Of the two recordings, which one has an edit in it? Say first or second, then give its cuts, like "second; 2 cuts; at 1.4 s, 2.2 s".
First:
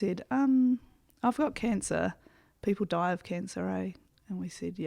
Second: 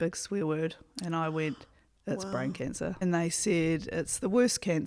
second; 1 cut; at 3.0 s